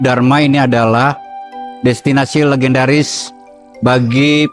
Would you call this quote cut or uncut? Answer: uncut